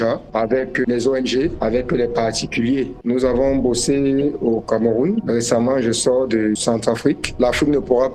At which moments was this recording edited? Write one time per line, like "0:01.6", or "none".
0:03.0
0:07.3